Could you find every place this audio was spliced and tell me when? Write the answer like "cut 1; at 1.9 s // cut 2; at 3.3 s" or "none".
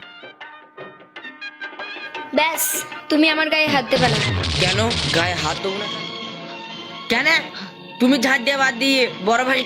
cut 1; at 1.2 s // cut 2; at 5.8 s